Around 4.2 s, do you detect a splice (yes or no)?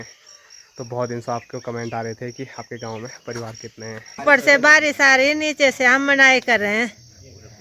yes